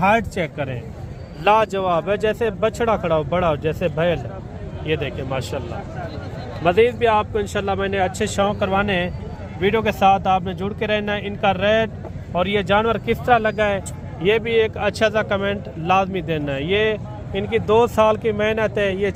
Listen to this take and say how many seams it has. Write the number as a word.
zero